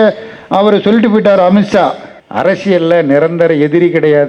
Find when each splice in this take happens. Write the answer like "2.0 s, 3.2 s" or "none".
2.1 s